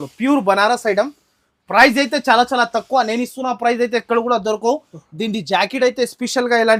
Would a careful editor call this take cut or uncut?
uncut